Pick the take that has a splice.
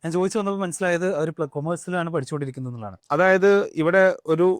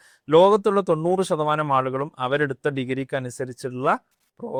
first; 1 cut; at 2.9 s

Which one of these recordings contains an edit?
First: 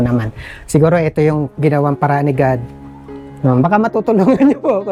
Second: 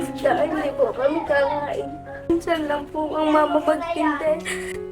second; 1 cut; at 2.3 s

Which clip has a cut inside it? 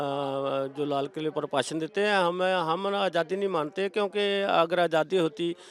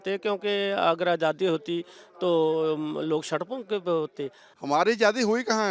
second; 1 cut; at 4.5 s

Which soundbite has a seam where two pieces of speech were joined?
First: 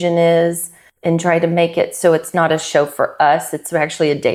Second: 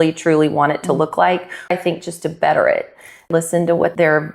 second; 2 cuts; at 1.7 s, 3.3 s

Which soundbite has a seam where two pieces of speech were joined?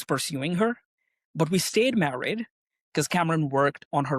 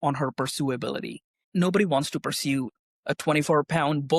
second; 2 cuts; at 1.5 s, 2.8 s

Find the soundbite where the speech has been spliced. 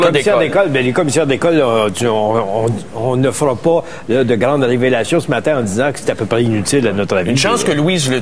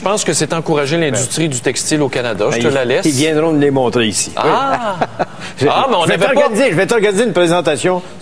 first; 1 cut; at 2.8 s

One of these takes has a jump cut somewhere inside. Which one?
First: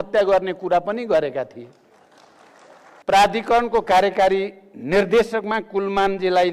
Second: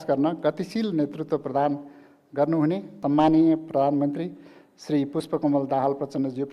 first; 1 cut; at 3.0 s

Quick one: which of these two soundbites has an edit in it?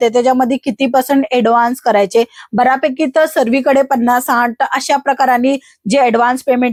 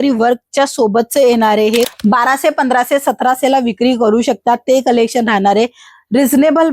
second; 1 cut; at 1.9 s

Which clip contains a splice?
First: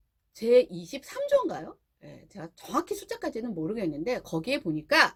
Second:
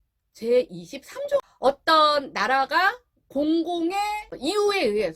second; 2 cuts; at 1.5 s, 4.3 s

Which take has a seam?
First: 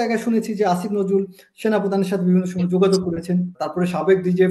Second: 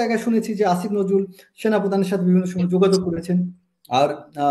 first; 1 cut; at 3.6 s

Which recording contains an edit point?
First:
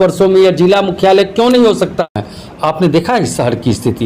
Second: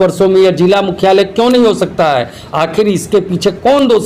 first; 1 cut; at 2.1 s

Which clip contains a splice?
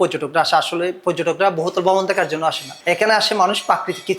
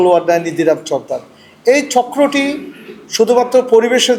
first; 1 cut; at 2.7 s

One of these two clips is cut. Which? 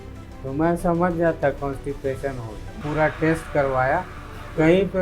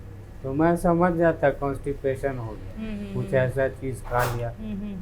first; 1 cut; at 2.8 s

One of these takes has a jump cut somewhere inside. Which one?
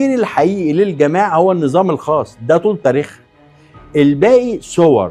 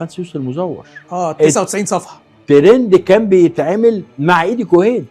second; 1 cut; at 0.9 s

